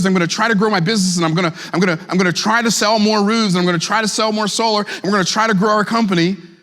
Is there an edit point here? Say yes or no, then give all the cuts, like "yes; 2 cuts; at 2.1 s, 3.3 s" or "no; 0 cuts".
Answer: no; 0 cuts